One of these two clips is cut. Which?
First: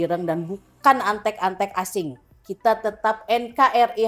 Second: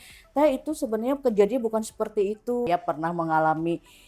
second; 1 cut; at 2.7 s

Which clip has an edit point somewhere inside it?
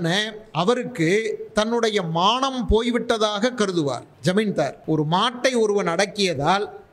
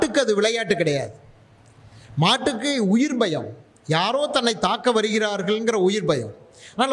first; 2 cuts; at 4.1 s, 4.8 s

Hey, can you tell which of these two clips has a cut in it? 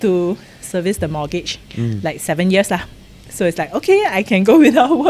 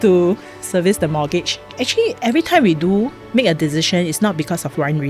second; 2 cuts; at 1.6 s, 3.2 s

